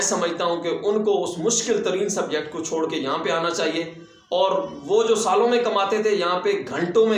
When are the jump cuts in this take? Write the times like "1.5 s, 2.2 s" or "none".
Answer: none